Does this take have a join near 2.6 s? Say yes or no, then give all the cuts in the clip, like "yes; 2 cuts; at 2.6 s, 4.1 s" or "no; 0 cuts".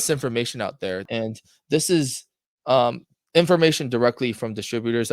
no; 1 cut; at 1.0 s